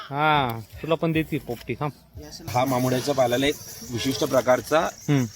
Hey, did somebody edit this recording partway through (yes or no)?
yes